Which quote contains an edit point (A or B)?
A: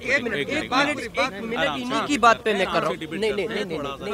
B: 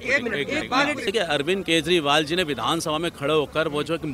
B